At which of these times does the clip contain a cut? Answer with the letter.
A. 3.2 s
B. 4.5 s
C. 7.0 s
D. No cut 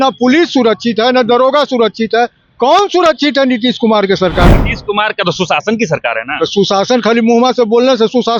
B